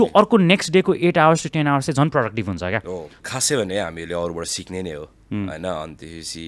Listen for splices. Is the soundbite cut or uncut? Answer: cut